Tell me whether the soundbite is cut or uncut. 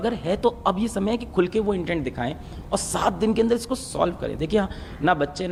uncut